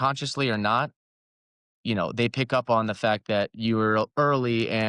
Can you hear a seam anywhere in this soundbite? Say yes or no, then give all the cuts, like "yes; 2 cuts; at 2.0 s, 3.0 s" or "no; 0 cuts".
no; 0 cuts